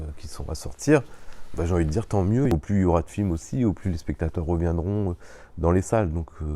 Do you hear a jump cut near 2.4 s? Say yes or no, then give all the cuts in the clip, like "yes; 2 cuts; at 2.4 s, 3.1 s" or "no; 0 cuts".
yes; 1 cut; at 2.4 s